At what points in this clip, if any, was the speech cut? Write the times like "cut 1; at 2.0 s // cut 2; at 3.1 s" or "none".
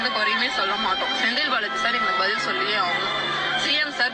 none